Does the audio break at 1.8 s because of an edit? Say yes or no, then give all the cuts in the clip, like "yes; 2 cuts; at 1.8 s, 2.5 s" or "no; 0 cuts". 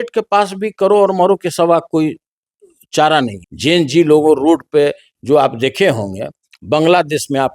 no; 1 cut; at 3.4 s